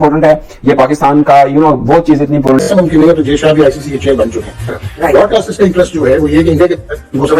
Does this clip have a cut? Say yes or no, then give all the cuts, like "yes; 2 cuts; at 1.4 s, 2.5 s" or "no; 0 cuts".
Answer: yes; 1 cut; at 2.6 s